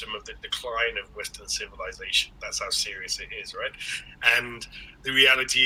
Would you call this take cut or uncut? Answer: uncut